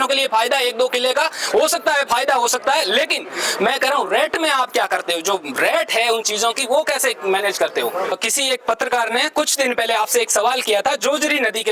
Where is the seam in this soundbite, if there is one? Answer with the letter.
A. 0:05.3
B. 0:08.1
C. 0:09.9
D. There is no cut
B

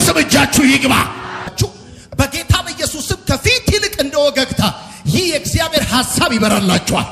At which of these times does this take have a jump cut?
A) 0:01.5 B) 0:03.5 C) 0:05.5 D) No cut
A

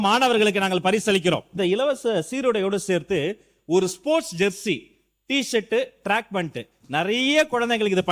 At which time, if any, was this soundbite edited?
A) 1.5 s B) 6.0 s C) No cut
A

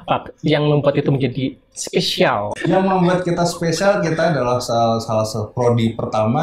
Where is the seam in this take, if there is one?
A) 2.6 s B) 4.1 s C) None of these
A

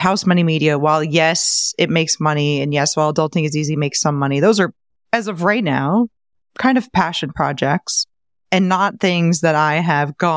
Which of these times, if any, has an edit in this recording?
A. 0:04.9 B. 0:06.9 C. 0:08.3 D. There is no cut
D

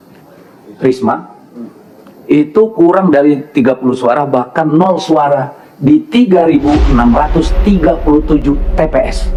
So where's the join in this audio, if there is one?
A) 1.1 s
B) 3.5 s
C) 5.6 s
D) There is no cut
D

